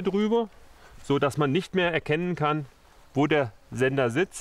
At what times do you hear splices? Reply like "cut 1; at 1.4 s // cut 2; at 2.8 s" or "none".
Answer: none

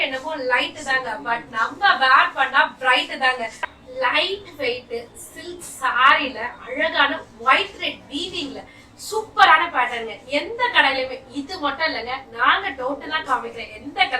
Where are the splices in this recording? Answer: cut 1; at 3.6 s

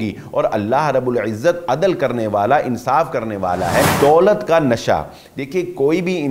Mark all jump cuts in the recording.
cut 1; at 3.9 s

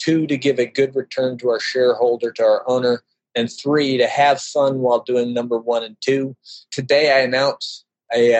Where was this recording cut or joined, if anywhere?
cut 1; at 6.7 s

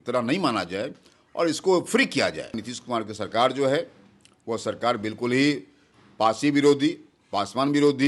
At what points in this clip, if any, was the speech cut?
cut 1; at 2.7 s

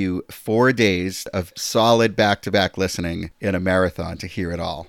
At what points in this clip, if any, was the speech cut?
cut 1; at 1.5 s // cut 2; at 3.3 s

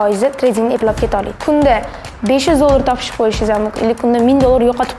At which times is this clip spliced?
cut 1; at 1.4 s

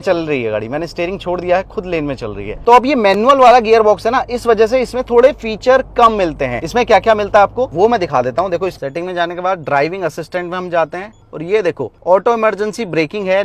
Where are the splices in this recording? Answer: none

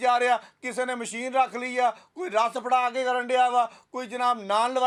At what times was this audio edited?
none

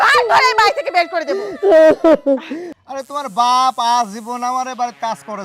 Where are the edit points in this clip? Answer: cut 1; at 2.6 s

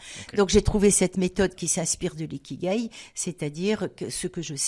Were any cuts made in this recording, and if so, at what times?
none

